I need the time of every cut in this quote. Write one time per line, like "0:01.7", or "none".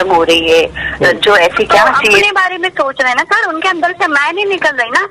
0:02.2